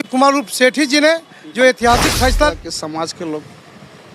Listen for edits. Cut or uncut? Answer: cut